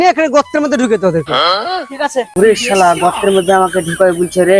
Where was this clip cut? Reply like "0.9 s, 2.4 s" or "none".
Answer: 2.3 s